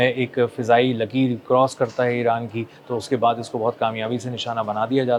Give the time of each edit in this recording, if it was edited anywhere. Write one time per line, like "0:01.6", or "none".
none